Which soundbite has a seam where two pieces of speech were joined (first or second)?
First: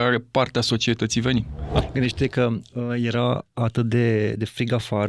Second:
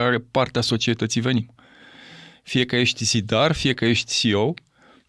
first